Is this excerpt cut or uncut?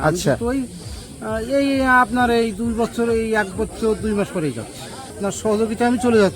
cut